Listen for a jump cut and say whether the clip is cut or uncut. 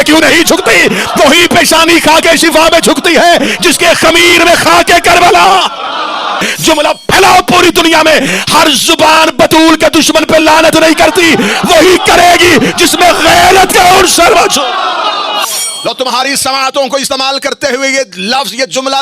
cut